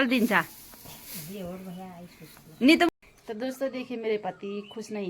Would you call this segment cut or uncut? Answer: cut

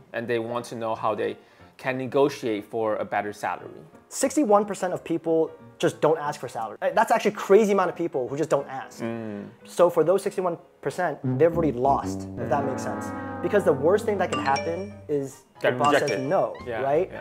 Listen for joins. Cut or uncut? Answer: cut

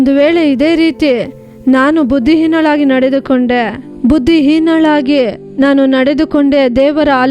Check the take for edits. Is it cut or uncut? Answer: uncut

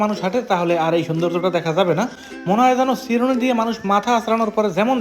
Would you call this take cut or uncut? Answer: uncut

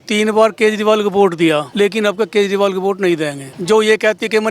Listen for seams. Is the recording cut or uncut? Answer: cut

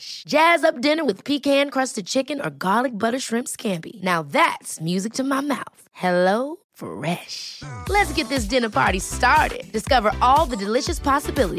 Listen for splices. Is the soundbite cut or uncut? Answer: uncut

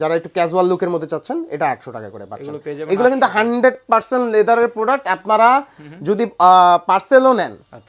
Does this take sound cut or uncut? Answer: uncut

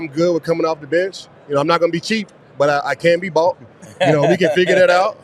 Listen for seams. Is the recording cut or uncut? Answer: cut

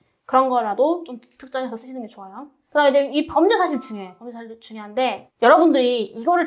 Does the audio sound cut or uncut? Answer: cut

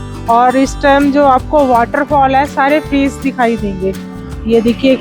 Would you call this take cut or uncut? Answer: uncut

